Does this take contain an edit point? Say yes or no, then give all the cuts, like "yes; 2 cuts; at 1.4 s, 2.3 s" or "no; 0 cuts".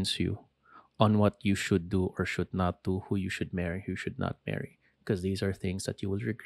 no; 0 cuts